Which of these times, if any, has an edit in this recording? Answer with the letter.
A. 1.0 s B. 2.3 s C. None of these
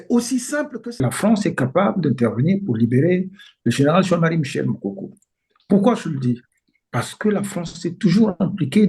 A